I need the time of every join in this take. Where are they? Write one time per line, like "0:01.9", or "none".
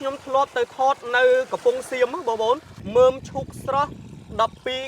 0:02.7

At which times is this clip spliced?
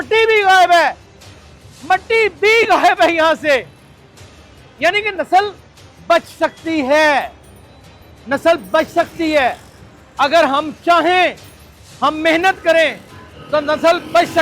none

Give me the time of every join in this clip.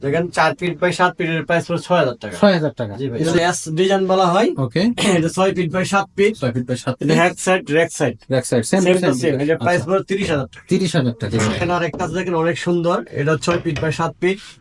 0:03.2
0:11.6

